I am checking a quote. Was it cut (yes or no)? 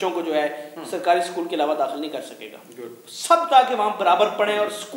no